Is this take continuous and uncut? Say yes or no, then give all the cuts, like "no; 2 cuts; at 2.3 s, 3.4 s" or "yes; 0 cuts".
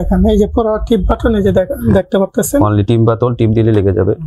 yes; 0 cuts